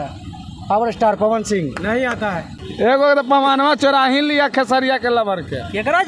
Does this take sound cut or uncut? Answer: cut